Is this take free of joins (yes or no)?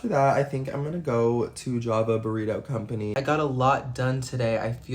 no